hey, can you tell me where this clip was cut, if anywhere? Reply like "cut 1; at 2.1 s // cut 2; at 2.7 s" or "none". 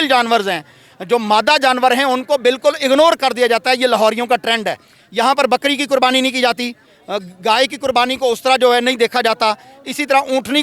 none